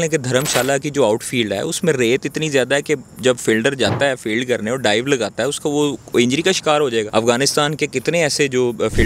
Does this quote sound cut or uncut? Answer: cut